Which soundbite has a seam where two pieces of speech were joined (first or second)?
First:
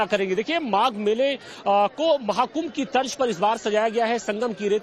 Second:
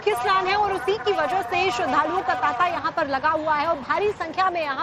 first